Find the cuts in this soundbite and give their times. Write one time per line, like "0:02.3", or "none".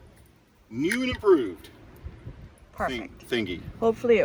none